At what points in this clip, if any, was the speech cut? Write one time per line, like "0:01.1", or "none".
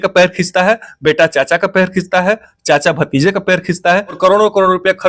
0:04.2